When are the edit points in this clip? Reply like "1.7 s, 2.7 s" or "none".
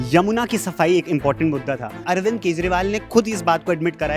2.0 s

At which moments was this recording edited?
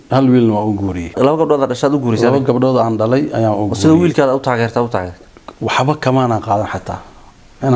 1.1 s

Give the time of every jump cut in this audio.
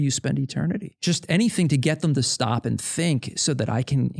1.0 s

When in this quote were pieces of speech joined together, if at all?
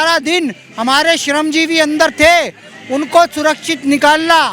none

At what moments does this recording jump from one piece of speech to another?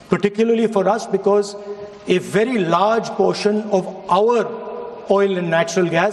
none

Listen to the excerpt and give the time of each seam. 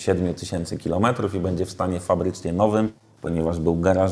none

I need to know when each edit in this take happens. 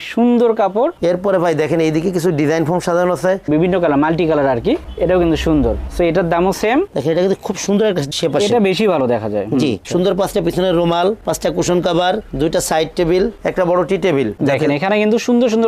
1.0 s, 3.5 s, 6.9 s, 9.8 s, 14.3 s

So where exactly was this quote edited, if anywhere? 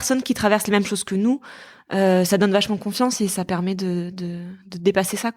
none

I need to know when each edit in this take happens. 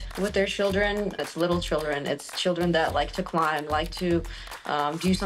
1.3 s

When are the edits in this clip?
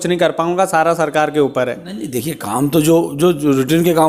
none

